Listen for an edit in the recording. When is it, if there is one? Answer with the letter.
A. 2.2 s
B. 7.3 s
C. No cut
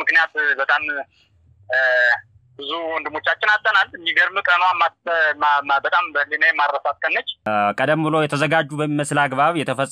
B